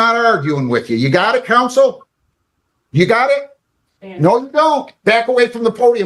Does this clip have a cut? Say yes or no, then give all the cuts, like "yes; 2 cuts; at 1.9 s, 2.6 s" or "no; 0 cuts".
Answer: no; 0 cuts